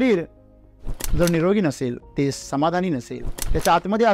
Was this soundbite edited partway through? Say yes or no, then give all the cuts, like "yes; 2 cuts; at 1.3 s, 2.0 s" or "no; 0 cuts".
yes; 1 cut; at 2.0 s